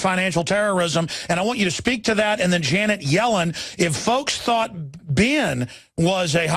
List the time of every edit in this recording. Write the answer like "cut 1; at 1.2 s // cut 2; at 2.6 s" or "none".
cut 1; at 5.6 s